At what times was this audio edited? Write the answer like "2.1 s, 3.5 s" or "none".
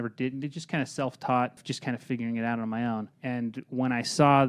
1.7 s, 3.1 s